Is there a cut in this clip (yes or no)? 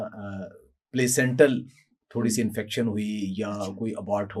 no